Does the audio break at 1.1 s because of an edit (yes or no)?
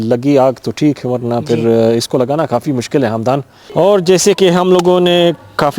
no